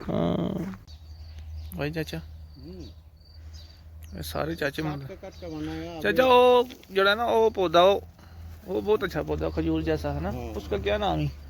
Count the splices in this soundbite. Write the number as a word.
one